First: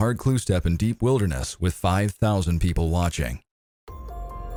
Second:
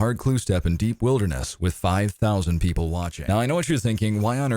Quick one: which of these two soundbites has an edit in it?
second; 1 cut; at 3.1 s

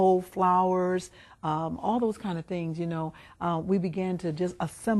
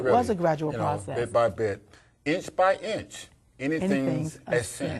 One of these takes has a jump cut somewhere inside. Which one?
first; 1 cut; at 2.9 s

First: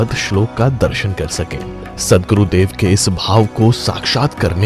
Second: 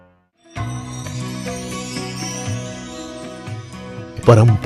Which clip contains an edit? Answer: second; 1 cut; at 1.1 s

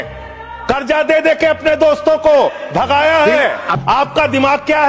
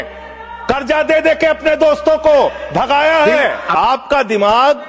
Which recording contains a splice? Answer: first; 1 cut; at 3.7 s

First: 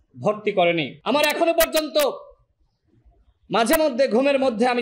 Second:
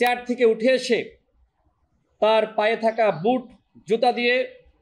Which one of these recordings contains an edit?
first; 1 cut; at 0.9 s

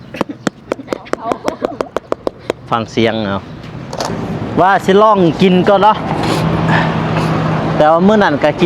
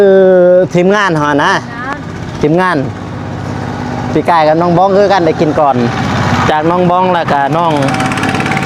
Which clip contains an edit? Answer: first; 1 cut; at 4.1 s

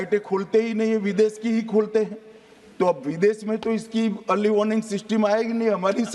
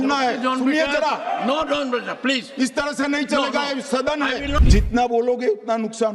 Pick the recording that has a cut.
second; 1 cut; at 4.6 s

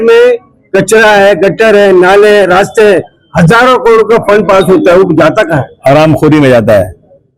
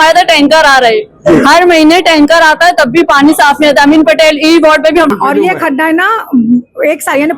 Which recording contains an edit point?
second; 1 cut; at 5.1 s

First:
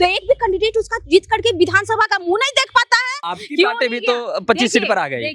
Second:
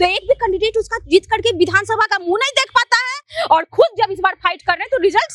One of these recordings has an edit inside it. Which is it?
first; 1 cut; at 3.2 s

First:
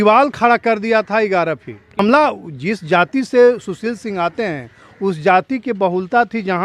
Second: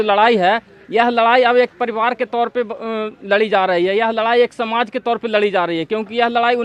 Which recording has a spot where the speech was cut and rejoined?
first; 1 cut; at 2.0 s

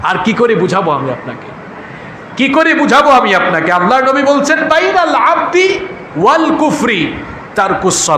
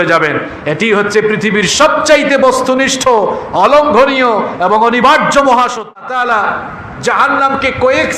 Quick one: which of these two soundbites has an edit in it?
second; 1 cut; at 6.0 s

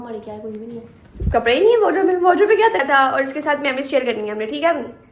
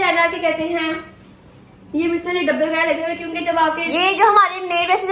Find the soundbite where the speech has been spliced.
first; 1 cut; at 2.8 s

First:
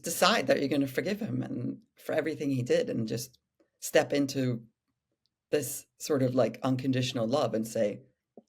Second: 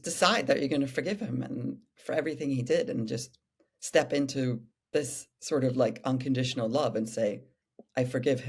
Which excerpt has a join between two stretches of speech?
second; 1 cut; at 4.7 s

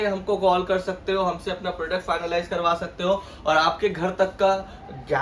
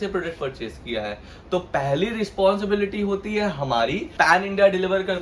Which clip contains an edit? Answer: second; 1 cut; at 4.1 s

